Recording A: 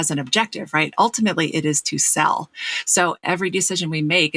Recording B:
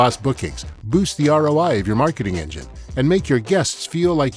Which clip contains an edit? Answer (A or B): A